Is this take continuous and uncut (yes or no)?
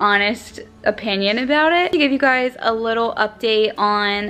no